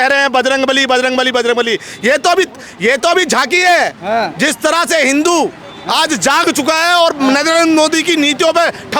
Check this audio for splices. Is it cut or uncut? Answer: uncut